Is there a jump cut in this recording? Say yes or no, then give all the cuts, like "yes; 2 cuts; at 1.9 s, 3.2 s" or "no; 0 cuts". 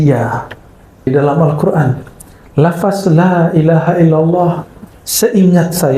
yes; 1 cut; at 1.1 s